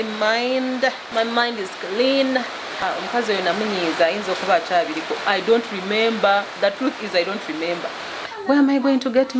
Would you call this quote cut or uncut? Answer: cut